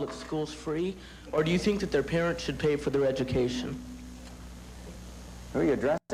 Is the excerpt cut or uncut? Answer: uncut